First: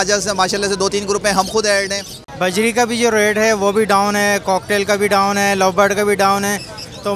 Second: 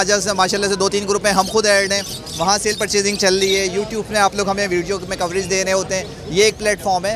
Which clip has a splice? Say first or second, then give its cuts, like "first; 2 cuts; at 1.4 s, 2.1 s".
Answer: first; 1 cut; at 2.2 s